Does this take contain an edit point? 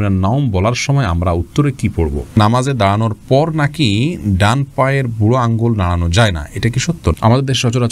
yes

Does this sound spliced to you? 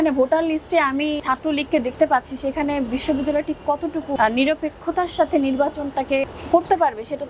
yes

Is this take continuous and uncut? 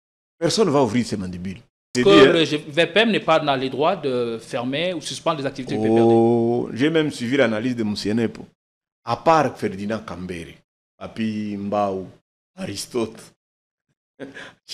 no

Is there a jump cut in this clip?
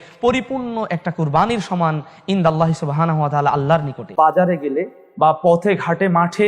yes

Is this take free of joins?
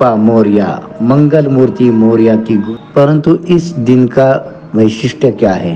no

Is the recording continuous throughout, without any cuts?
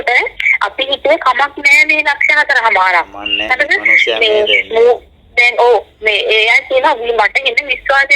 yes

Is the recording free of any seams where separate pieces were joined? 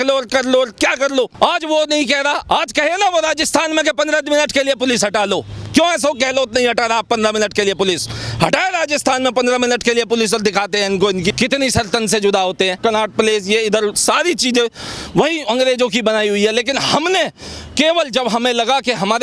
no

